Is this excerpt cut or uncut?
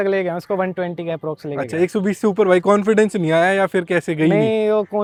uncut